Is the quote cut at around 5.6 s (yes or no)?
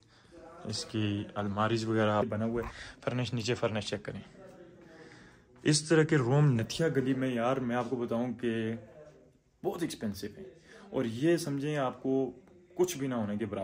no